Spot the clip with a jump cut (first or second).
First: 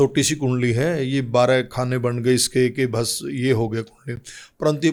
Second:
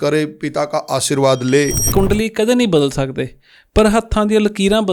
second